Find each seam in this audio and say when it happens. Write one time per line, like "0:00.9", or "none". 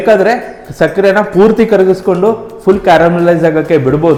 none